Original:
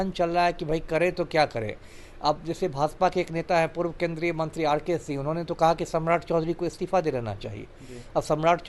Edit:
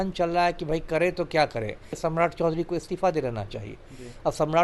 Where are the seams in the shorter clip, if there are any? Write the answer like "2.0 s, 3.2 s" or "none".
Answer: 1.9 s